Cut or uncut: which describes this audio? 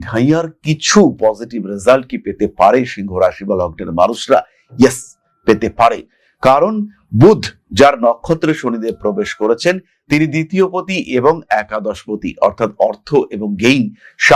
uncut